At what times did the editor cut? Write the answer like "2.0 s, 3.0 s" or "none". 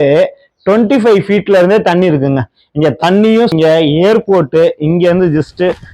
3.5 s